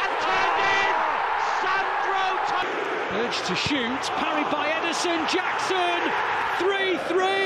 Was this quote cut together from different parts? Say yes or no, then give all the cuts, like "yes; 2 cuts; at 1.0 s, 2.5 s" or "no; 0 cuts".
no; 0 cuts